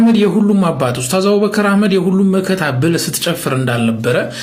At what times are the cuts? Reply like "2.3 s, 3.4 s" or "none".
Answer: none